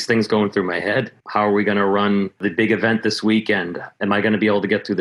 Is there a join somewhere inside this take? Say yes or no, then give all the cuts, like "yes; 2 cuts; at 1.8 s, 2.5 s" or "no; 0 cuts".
yes; 2 cuts; at 1.2 s, 2.4 s